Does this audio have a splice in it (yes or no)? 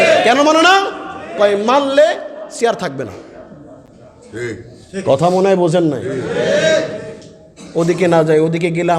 no